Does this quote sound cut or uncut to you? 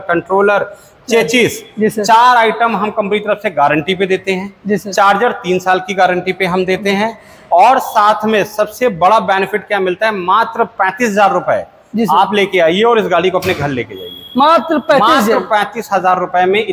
uncut